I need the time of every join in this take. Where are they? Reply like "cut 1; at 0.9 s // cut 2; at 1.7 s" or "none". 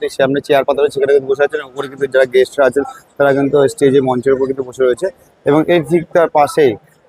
none